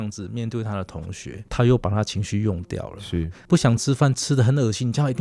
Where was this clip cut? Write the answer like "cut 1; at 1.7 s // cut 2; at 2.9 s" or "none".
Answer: cut 1; at 1.4 s